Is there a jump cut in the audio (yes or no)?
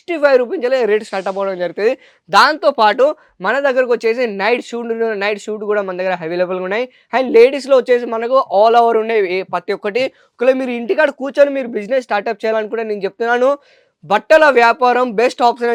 no